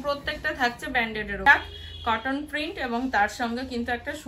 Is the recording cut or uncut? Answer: cut